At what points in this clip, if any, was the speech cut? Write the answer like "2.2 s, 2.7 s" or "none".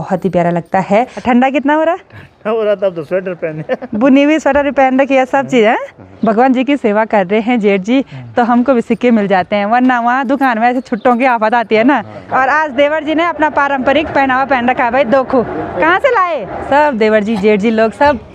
1.1 s, 6.1 s, 12.2 s, 16.7 s